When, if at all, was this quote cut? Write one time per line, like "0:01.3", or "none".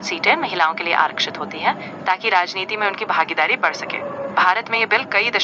none